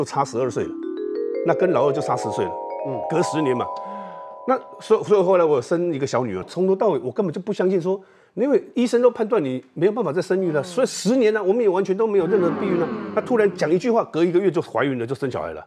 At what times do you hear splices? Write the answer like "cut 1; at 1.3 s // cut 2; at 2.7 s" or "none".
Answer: cut 1; at 6.5 s